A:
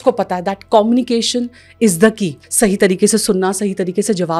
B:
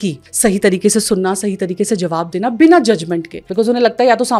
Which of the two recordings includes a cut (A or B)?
B